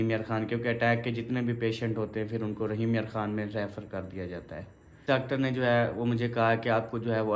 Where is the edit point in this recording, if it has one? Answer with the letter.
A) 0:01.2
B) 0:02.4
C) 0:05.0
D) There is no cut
C